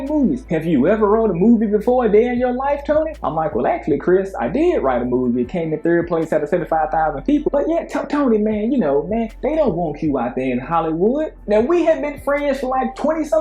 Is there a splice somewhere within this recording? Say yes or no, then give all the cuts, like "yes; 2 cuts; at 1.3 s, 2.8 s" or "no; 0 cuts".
no; 0 cuts